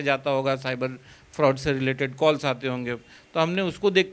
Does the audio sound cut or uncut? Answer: uncut